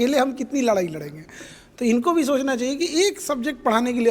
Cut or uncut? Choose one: uncut